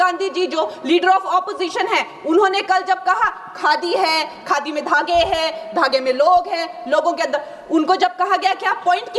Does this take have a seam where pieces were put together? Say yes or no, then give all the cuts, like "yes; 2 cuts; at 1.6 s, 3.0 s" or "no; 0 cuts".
no; 0 cuts